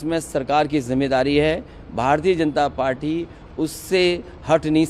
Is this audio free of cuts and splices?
yes; 0 cuts

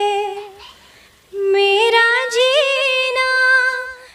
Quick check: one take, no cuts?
yes; 0 cuts

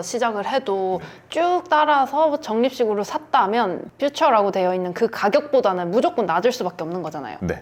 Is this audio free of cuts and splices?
yes; 0 cuts

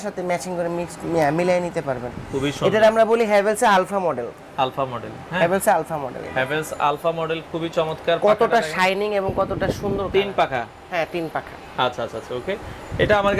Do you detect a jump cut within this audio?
no; 0 cuts

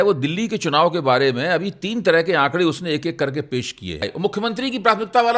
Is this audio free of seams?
no; 1 cut; at 4.1 s

